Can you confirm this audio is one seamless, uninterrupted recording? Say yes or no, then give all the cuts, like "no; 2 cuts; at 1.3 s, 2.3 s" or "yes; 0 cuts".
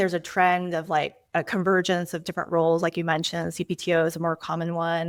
yes; 0 cuts